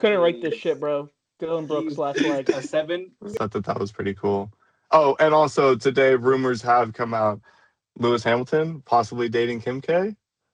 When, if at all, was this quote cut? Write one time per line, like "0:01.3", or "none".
0:03.3